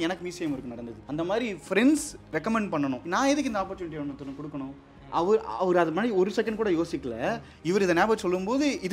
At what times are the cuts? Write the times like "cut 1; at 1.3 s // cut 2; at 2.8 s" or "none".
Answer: cut 1; at 1.0 s // cut 2; at 2.2 s // cut 3; at 3.0 s